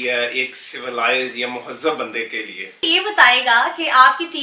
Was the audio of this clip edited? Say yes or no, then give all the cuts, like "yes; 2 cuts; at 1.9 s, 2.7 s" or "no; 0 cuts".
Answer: yes; 1 cut; at 2.8 s